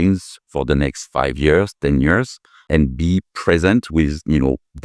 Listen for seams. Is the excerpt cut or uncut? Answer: cut